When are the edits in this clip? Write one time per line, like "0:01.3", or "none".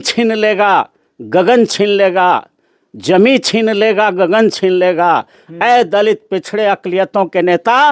none